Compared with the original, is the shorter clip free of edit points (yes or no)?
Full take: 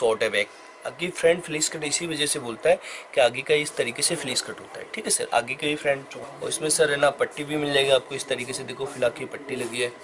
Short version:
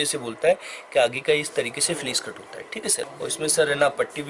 no